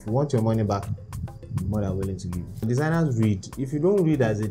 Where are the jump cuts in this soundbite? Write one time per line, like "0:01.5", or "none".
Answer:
0:02.6